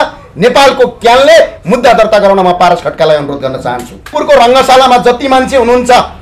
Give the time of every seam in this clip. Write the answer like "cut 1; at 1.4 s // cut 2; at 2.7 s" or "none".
cut 1; at 4.1 s